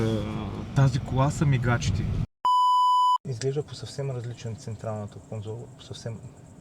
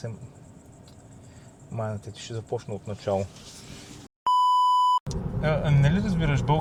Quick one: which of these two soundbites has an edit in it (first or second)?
first